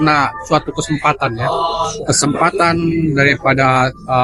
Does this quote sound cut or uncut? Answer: uncut